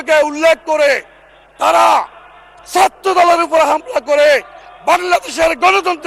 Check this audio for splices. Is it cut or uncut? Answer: uncut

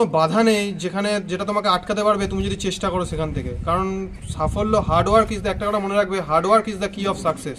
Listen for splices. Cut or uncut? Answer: uncut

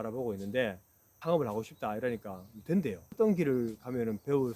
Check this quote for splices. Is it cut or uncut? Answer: cut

